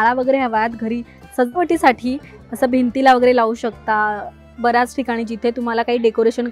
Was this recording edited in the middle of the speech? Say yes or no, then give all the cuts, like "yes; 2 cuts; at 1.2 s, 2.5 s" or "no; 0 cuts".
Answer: no; 0 cuts